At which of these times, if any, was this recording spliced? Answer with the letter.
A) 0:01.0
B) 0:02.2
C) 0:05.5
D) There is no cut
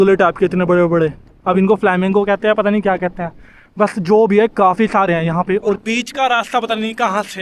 C